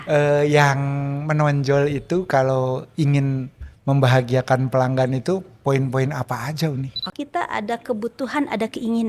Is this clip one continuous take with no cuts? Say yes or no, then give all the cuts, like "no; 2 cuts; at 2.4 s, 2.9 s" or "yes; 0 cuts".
no; 1 cut; at 7.1 s